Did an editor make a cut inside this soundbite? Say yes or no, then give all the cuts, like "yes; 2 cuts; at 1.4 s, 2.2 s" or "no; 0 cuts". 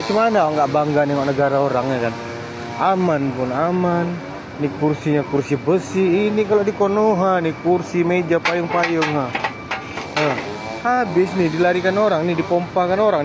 no; 0 cuts